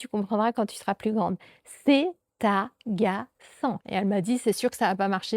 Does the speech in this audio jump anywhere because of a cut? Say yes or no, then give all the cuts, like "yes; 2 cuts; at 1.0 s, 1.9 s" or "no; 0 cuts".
yes; 1 cut; at 3.8 s